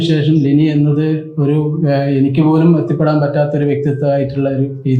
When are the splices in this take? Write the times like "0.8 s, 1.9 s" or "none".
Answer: none